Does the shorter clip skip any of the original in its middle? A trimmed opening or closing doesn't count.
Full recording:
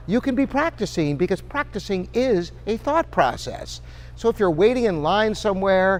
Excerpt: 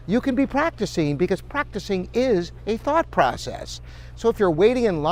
no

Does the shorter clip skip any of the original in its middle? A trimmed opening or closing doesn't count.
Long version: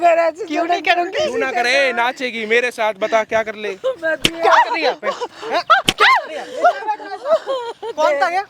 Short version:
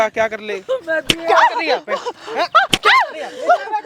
no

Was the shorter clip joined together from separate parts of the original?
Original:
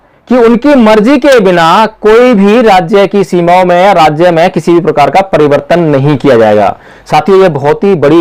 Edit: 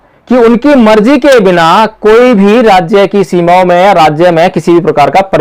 no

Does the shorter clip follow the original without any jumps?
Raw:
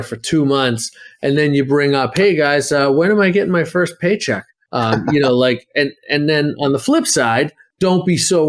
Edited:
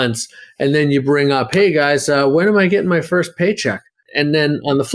no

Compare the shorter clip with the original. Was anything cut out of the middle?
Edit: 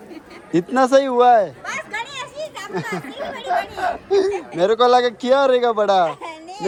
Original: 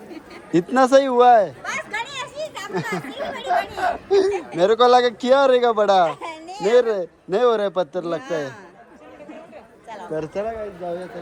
no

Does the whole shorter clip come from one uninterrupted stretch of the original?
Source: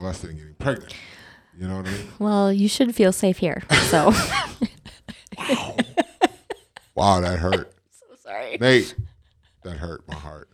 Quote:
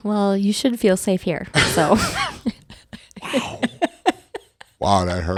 yes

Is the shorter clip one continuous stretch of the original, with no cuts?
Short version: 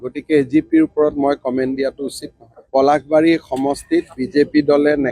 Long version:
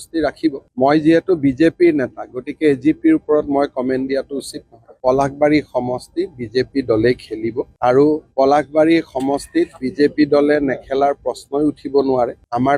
no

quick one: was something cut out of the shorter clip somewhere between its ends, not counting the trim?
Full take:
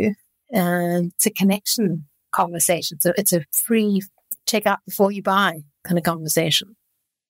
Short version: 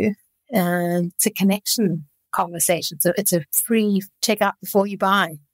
yes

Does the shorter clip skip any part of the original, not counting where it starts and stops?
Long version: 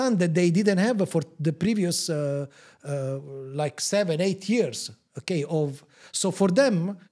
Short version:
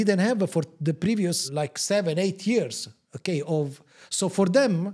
yes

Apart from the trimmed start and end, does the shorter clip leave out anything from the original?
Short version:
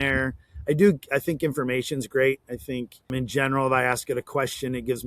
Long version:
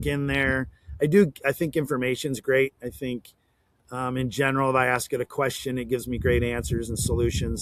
yes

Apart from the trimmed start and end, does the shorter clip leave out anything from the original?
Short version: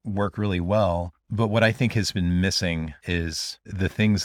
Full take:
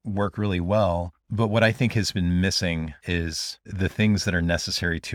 no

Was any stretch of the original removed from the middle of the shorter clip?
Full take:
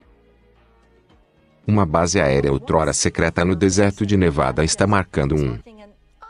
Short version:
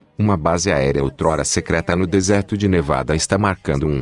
no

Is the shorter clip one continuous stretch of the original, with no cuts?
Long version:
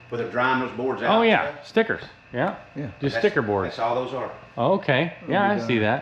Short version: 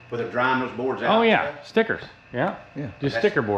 yes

